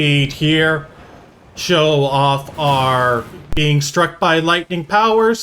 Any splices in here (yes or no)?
yes